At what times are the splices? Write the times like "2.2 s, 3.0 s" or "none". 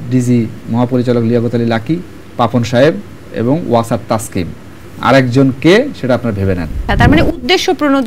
2.2 s, 6.9 s